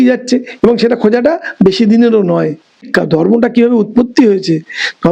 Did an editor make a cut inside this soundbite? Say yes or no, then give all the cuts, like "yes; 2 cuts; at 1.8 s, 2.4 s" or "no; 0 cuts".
yes; 1 cut; at 2.8 s